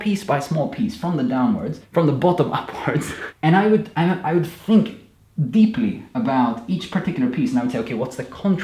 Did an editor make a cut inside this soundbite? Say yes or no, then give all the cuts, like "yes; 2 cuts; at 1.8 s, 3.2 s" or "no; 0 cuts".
yes; 3 cuts; at 1.8 s, 3.2 s, 6.0 s